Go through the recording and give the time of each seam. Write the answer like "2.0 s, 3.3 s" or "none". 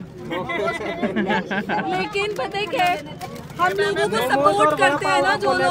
none